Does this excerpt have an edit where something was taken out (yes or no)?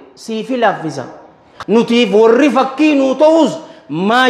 yes